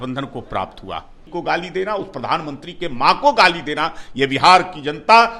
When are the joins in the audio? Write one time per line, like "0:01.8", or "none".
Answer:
0:01.2